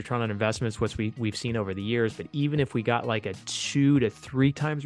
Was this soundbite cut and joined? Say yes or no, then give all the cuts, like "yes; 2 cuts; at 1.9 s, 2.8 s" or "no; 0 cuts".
no; 0 cuts